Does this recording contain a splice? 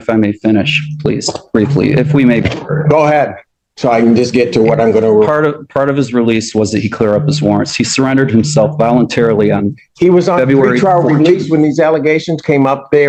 no; 0 cuts

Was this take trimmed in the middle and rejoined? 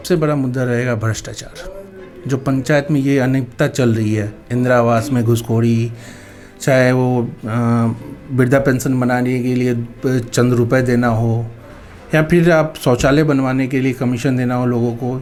no; 0 cuts

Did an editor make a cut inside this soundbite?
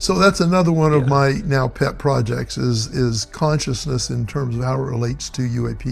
no; 0 cuts

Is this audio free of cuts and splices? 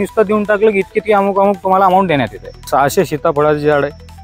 no; 1 cut; at 2.7 s

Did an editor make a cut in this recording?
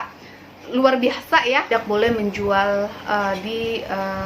yes; 1 cut; at 1.7 s

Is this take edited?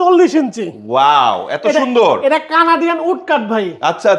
no; 0 cuts

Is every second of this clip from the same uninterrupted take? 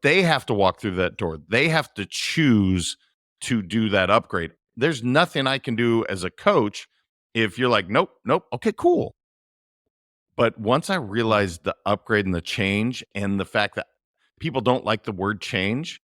yes; 0 cuts

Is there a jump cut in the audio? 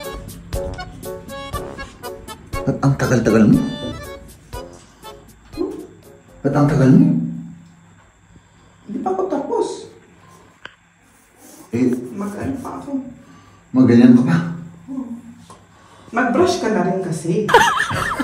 no; 0 cuts

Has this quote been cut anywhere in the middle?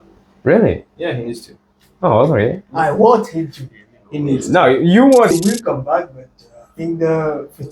yes; 1 cut; at 5.3 s

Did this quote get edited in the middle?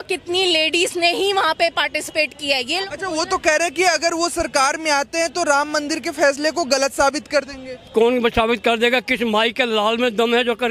yes; 1 cut; at 2.8 s

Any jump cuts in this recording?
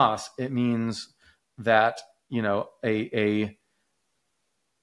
no; 0 cuts

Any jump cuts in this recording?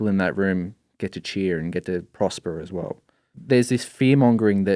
yes; 1 cut; at 3.3 s

